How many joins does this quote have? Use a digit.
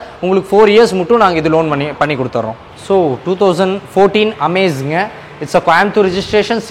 0